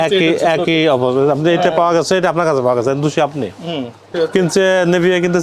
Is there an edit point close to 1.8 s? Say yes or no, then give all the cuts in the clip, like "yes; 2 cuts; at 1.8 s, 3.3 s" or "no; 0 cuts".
no; 1 cut; at 4.1 s